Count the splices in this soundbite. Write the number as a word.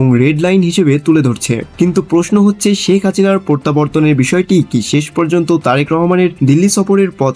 two